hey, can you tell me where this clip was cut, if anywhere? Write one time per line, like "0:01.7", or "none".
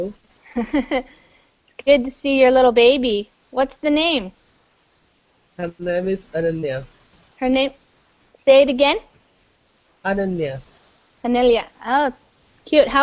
0:04.9